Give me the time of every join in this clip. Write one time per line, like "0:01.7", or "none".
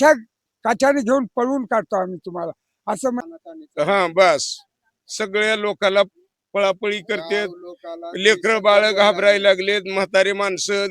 0:03.2